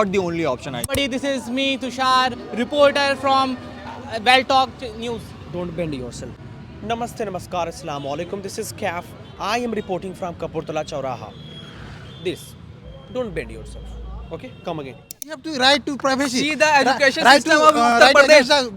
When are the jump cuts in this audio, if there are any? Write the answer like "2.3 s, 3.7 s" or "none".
0.9 s, 6.4 s, 15.5 s